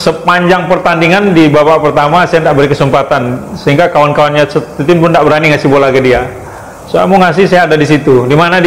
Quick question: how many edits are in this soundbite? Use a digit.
0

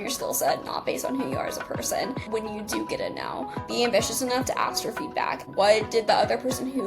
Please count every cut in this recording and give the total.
3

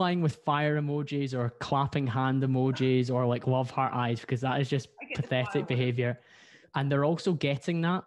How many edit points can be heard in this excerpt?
0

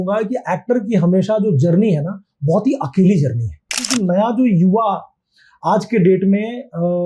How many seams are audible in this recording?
1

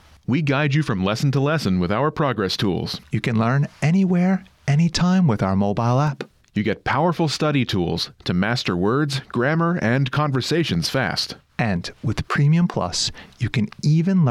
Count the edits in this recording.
0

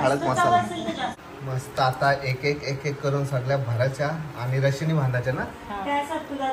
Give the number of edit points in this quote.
1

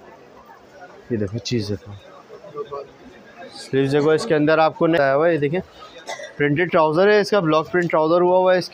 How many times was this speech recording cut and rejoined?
1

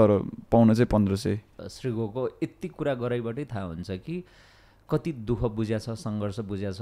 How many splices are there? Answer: 1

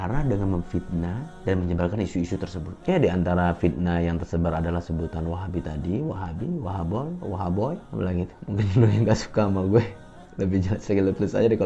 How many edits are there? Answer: 1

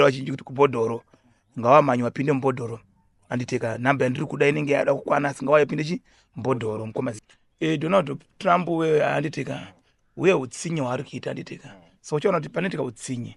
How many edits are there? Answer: 1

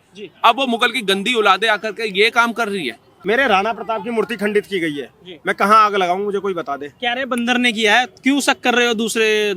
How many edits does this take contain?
1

